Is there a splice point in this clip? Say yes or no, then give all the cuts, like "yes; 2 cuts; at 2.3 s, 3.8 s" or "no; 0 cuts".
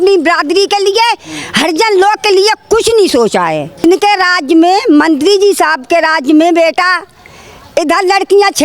yes; 1 cut; at 3.8 s